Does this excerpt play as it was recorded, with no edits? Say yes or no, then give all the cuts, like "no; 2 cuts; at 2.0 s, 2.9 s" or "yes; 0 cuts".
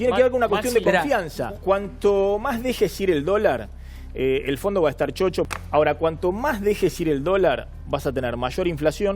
no; 2 cuts; at 1.6 s, 5.5 s